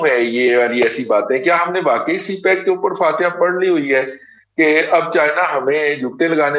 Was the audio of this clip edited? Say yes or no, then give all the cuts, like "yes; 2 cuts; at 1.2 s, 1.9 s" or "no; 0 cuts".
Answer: no; 0 cuts